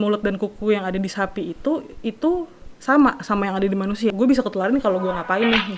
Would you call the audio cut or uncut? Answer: cut